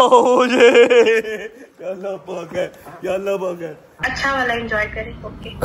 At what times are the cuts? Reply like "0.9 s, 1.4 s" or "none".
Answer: 4.1 s